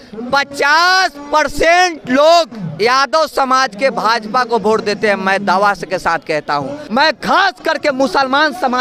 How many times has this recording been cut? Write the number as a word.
one